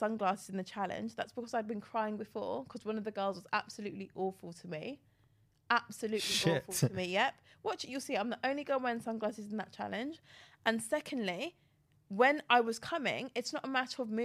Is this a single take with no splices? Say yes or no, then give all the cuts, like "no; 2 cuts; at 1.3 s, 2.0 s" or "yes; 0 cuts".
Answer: yes; 0 cuts